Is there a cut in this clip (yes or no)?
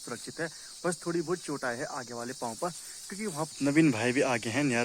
yes